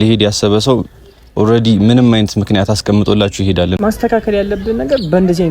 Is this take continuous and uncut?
no; 1 cut; at 3.8 s

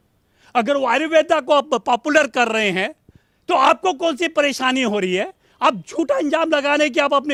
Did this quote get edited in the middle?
no; 0 cuts

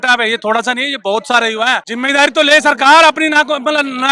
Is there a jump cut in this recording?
yes; 1 cut; at 1.9 s

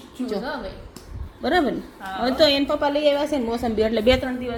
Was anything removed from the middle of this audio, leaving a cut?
no; 0 cuts

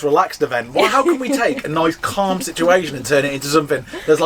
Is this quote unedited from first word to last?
yes; 0 cuts

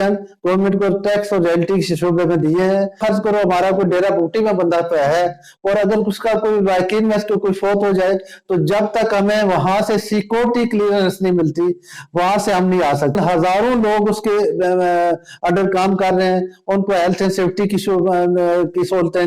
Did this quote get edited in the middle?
yes; 2 cuts; at 3.0 s, 13.1 s

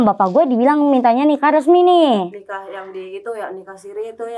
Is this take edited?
no; 0 cuts

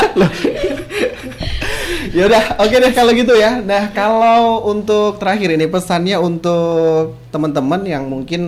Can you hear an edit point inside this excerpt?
no; 0 cuts

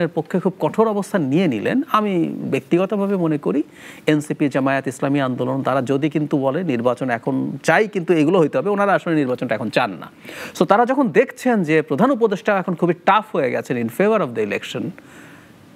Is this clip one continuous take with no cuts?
yes; 0 cuts

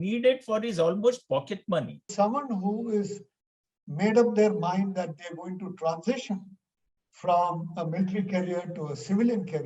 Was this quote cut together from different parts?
yes; 1 cut; at 2.1 s

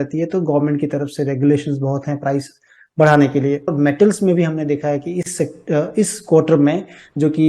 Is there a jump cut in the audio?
yes; 1 cut; at 3.7 s

